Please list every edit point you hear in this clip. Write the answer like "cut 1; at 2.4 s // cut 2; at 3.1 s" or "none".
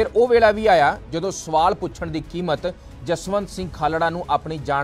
none